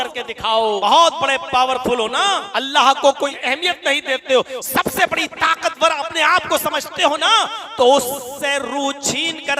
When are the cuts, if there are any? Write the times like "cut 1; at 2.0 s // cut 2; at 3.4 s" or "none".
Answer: cut 1; at 0.8 s // cut 2; at 2.5 s // cut 3; at 3.4 s